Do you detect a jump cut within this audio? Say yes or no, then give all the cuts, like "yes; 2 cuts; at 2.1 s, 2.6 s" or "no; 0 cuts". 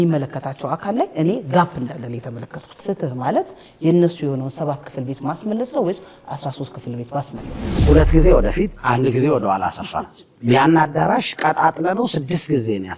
yes; 2 cuts; at 2.8 s, 7.6 s